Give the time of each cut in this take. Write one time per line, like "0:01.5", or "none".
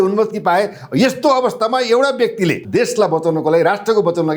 0:02.6